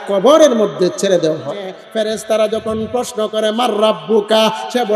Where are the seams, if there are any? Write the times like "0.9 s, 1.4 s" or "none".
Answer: 1.8 s